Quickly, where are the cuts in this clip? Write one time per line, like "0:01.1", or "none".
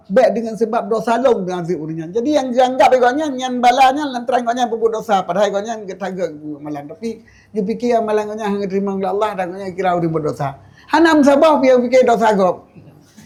none